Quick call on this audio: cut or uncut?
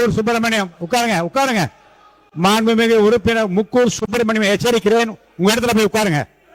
uncut